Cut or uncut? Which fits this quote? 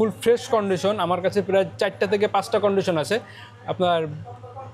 uncut